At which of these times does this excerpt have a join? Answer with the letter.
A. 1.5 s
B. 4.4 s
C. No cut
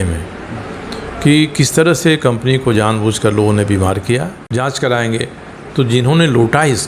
B